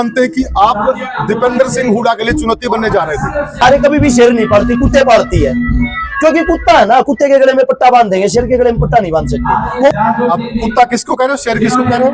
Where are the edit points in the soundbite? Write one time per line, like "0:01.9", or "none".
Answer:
0:03.6
0:09.9